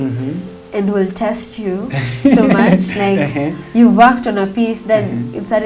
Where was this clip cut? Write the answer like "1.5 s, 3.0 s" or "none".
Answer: none